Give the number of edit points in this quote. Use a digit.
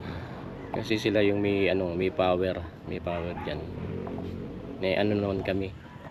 0